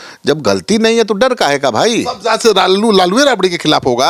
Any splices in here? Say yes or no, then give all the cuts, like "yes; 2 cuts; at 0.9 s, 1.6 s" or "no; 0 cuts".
no; 0 cuts